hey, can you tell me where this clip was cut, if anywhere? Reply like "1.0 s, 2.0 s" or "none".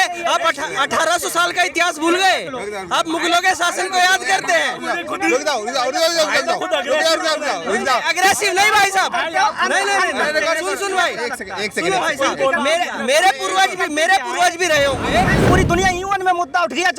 15.4 s